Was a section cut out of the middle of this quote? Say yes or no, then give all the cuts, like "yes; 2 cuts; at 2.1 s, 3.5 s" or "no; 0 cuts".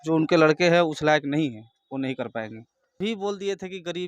yes; 1 cut; at 3.0 s